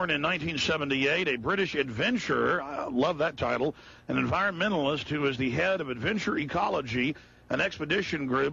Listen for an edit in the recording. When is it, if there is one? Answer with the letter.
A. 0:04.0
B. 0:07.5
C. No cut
B